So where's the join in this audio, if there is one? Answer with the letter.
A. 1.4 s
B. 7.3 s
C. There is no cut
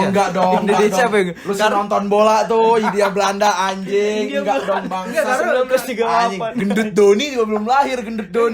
C